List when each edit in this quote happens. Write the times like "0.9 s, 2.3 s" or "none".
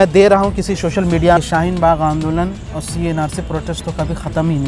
1.4 s

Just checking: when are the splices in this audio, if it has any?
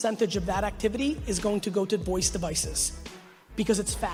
none

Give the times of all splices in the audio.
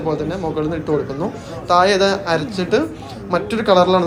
none

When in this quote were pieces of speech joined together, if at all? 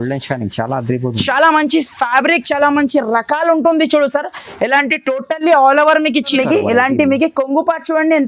6.3 s

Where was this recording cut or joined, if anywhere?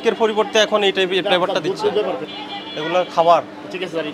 2.3 s

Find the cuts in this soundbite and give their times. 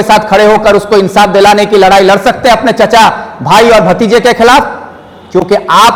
none

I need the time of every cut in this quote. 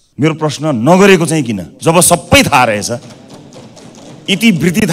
1.6 s

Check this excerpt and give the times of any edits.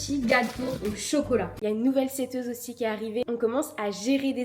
1.5 s, 3.2 s

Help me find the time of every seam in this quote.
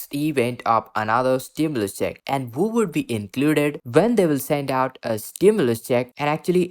3.8 s

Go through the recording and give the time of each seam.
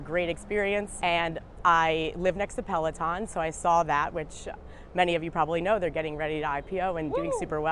none

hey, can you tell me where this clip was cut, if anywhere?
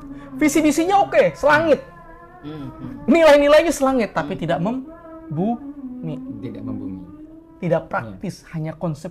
none

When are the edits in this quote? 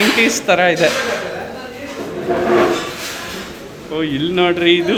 none

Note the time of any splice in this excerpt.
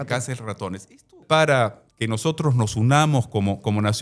1.2 s

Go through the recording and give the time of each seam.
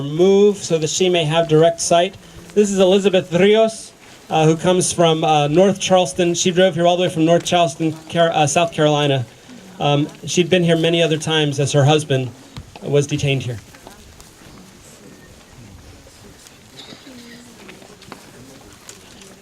12.2 s

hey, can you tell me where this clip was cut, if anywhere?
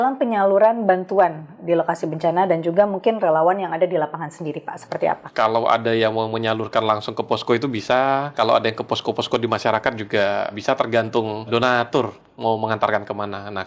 5.2 s, 8.3 s, 10.5 s, 11.5 s

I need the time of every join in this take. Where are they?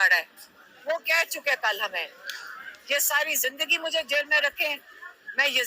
1.0 s

